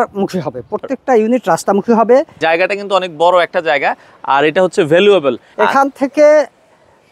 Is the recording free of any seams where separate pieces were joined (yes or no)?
no